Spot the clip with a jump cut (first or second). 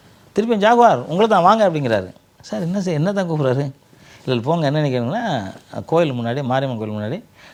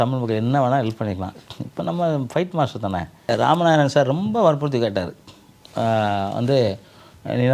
second